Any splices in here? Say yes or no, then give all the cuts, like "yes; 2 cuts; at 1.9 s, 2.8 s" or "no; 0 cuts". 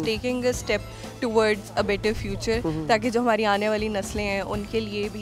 no; 0 cuts